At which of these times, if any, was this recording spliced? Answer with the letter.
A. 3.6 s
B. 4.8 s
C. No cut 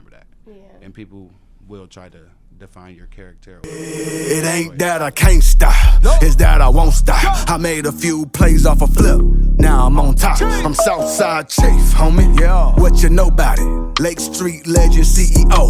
A